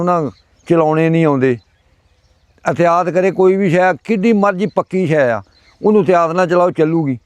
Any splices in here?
no; 0 cuts

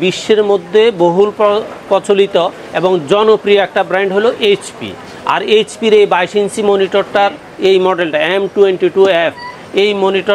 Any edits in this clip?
no; 0 cuts

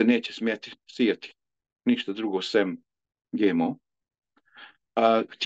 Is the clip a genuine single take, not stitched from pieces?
yes; 0 cuts

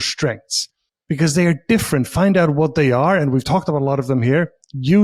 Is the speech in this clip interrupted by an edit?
no; 0 cuts

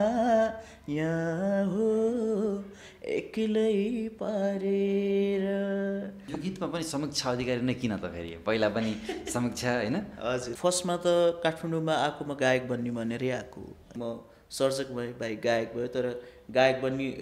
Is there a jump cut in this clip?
yes; 3 cuts; at 6.2 s, 10.5 s, 13.9 s

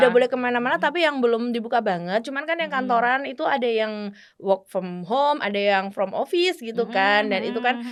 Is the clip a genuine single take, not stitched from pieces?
yes; 0 cuts

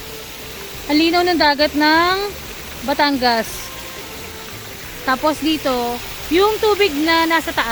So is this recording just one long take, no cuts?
yes; 0 cuts

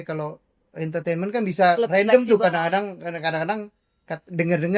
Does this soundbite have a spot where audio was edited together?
no; 0 cuts

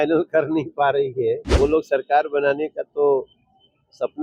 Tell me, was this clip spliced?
yes; 1 cut; at 1.5 s

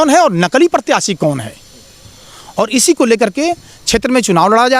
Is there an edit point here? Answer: no; 0 cuts

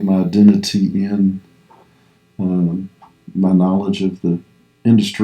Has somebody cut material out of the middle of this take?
no; 0 cuts

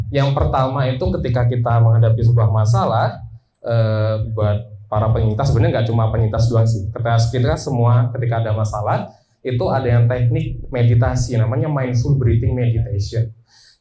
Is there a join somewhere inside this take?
no; 0 cuts

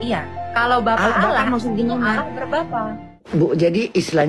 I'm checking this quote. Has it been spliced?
yes; 1 cut; at 3.1 s

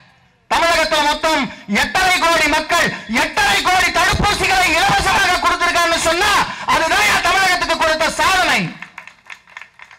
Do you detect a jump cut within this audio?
no; 0 cuts

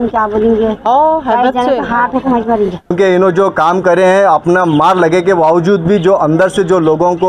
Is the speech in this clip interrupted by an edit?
yes; 1 cut; at 2.9 s

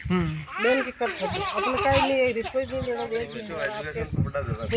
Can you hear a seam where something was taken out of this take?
yes; 1 cut; at 3.8 s

